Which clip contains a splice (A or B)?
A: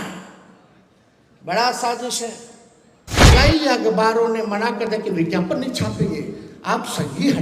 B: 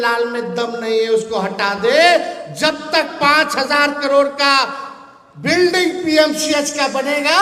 A